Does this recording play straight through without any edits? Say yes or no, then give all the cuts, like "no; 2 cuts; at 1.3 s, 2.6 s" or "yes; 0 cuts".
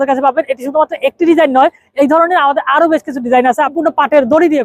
no; 1 cut; at 3.7 s